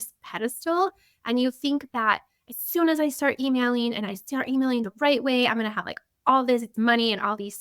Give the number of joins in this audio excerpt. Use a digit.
1